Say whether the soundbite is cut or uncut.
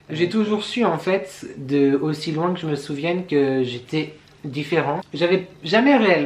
cut